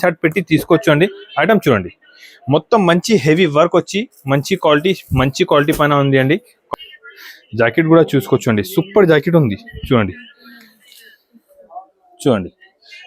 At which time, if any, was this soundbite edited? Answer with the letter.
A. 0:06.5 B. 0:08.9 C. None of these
A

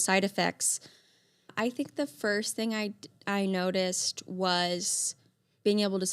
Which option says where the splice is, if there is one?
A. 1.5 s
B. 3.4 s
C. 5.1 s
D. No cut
A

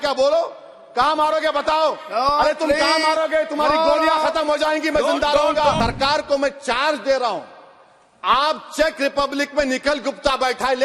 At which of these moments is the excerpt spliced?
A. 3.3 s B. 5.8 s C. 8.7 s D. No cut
B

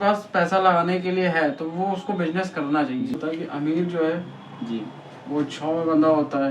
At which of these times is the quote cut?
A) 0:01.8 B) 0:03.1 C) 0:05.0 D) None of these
B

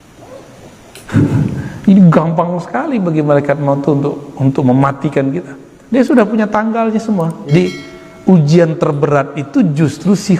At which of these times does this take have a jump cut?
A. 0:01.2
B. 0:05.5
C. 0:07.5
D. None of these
C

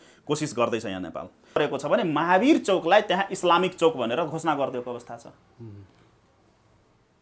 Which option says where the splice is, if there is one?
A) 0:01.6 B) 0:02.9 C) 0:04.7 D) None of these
A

